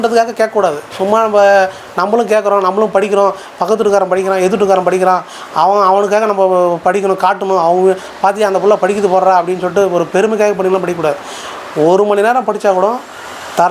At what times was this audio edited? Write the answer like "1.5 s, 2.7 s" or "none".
none